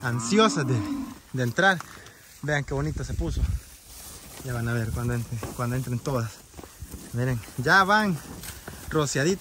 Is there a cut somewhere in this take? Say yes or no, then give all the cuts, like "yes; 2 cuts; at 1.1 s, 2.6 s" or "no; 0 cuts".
no; 0 cuts